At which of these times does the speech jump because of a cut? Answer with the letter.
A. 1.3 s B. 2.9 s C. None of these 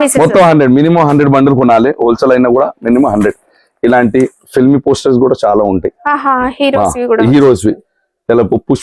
C